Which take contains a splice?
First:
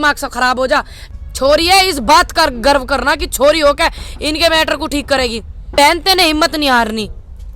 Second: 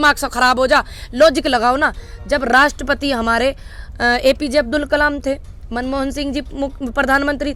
first; 2 cuts; at 1.0 s, 5.8 s

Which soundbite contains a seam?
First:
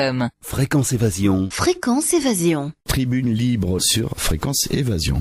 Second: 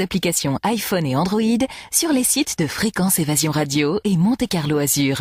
first; 1 cut; at 2.8 s

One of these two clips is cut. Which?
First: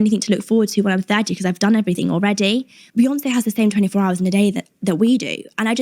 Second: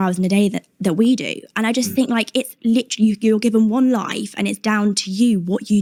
first; 1 cut; at 2.8 s

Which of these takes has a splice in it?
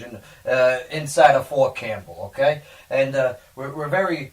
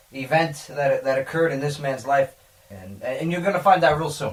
first; 1 cut; at 1.7 s

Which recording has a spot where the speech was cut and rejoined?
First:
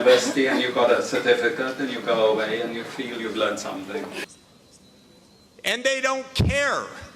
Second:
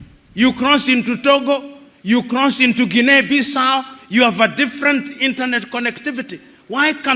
first; 1 cut; at 4.2 s

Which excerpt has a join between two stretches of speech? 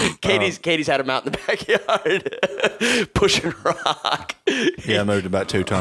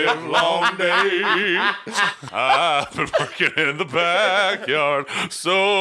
second; 1 cut; at 2.2 s

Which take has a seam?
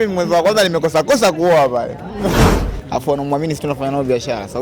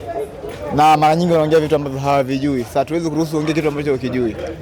first; 1 cut; at 2.6 s

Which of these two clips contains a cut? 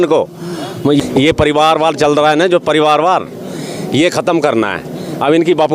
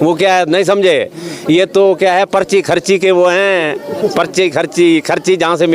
first; 1 cut; at 1.0 s

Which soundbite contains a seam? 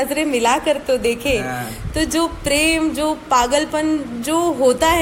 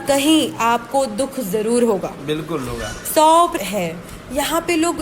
second; 1 cut; at 3.5 s

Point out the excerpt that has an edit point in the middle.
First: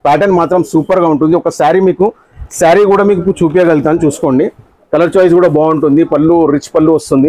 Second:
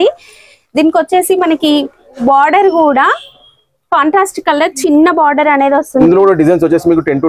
second; 1 cut; at 6.0 s

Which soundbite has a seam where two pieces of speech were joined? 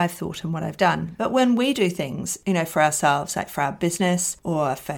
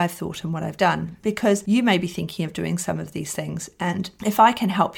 first; 1 cut; at 1.1 s

